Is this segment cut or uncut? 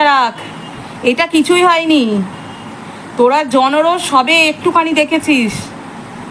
uncut